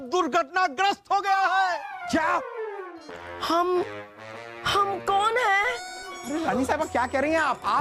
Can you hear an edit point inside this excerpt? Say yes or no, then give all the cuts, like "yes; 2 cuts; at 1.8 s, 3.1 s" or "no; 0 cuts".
yes; 2 cuts; at 2.6 s, 6.1 s